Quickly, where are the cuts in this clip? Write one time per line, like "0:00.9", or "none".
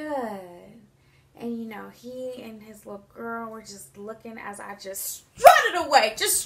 none